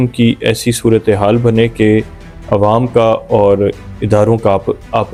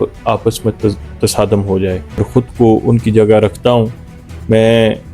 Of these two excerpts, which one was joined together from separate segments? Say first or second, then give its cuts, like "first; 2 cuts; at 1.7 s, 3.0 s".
second; 1 cut; at 2.3 s